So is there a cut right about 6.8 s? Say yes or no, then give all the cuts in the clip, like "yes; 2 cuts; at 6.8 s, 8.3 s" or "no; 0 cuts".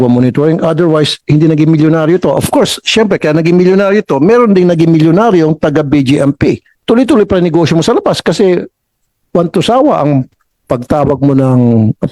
yes; 1 cut; at 6.8 s